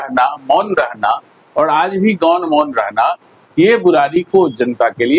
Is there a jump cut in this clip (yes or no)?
no